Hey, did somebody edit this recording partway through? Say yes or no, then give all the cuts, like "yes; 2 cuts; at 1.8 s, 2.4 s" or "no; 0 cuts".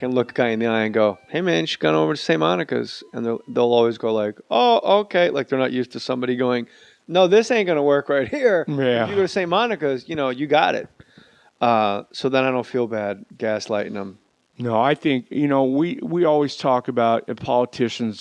yes; 1 cut; at 2.0 s